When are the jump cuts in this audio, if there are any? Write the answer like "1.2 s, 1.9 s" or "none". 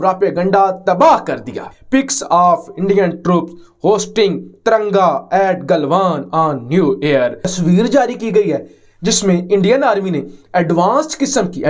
1.7 s, 7.4 s